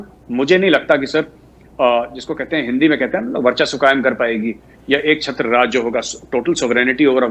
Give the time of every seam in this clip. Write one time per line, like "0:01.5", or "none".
none

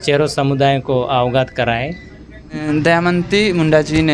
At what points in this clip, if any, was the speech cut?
0:02.6

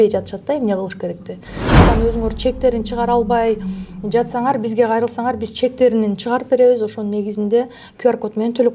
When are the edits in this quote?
0:01.8

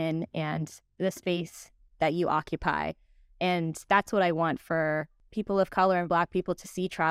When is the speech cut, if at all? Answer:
0:05.2

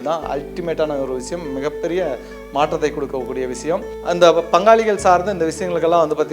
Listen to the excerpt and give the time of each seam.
0:03.9

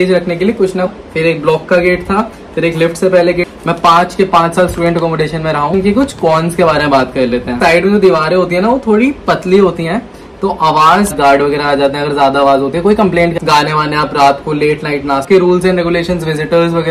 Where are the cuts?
0:00.9
0:03.5
0:05.7
0:07.6
0:11.1
0:13.4
0:15.2

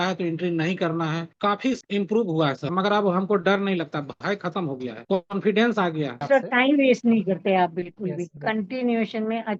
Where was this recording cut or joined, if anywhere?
0:02.7
0:06.2

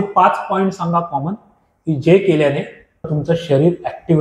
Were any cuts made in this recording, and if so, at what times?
0:03.1

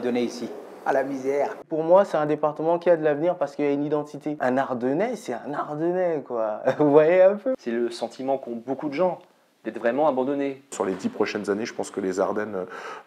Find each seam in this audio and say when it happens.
0:01.6
0:04.4
0:07.6
0:10.7

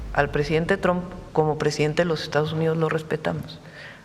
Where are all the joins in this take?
0:01.2

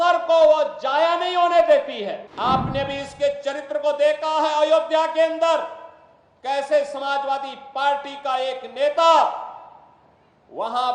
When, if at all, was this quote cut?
0:02.3

